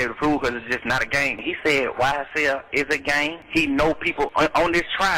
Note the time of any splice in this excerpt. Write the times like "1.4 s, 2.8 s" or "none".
1.4 s, 3.4 s, 4.3 s